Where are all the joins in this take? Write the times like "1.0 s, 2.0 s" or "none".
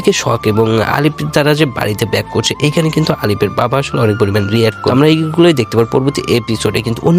4.8 s